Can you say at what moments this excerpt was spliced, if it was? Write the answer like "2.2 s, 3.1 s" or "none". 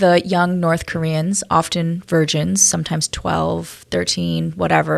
none